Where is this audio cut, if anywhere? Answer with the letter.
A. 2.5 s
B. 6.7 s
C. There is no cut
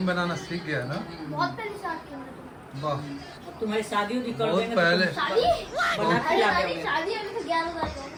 C